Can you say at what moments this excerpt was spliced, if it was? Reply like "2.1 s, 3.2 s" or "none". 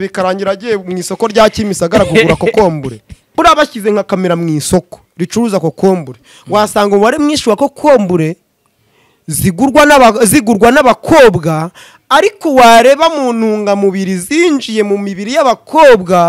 3.2 s